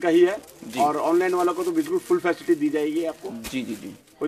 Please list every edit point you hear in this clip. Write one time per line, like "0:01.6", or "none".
none